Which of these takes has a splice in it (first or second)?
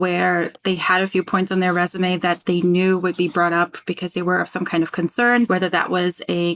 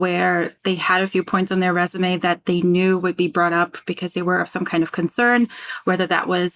first